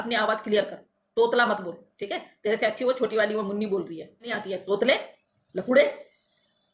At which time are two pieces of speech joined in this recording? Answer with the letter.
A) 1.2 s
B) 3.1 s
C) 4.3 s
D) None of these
C